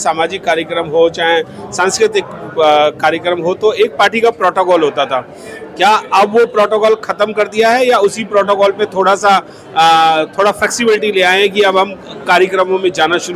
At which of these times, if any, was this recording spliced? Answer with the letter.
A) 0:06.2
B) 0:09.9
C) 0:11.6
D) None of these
D